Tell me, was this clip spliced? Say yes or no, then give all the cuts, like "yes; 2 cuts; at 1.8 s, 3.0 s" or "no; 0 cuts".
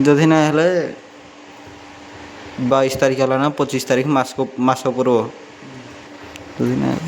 no; 0 cuts